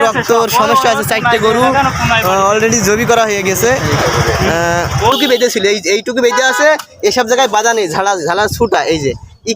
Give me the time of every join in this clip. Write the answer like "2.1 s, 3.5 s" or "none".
5.1 s